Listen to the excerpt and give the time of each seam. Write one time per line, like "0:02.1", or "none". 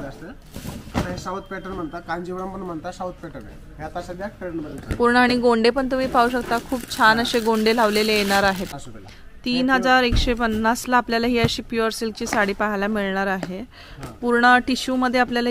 0:08.8